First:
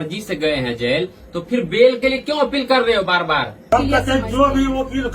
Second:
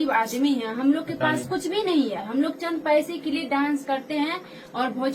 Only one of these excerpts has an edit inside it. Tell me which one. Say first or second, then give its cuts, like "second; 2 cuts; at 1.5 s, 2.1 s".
first; 1 cut; at 3.7 s